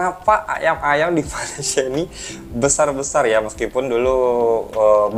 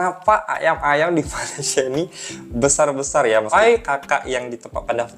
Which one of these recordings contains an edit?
second; 1 cut; at 3.5 s

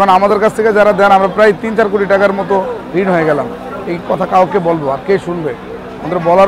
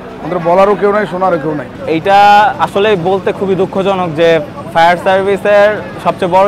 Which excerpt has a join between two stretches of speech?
second; 1 cut; at 1.7 s

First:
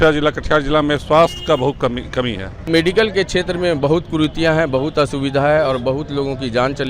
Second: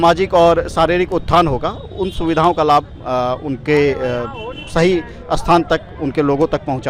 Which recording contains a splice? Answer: first; 1 cut; at 2.7 s

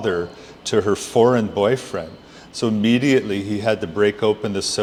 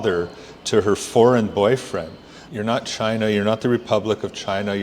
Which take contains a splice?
second; 1 cut; at 2.4 s

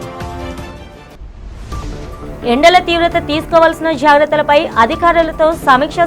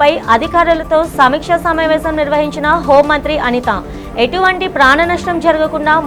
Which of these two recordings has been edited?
first; 1 cut; at 0.9 s

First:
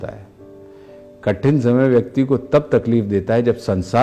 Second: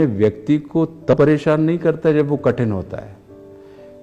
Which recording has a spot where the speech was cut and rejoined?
second; 1 cut; at 1.1 s

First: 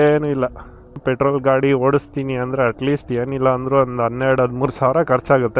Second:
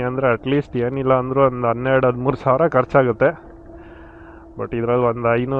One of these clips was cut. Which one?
first; 1 cut; at 1.0 s

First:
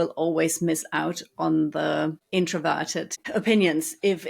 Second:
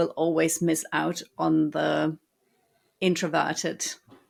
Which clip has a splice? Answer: first; 2 cuts; at 2.2 s, 3.2 s

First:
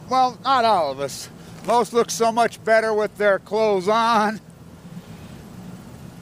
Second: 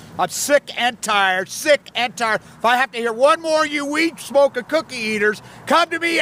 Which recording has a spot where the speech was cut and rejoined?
first; 1 cut; at 2.6 s

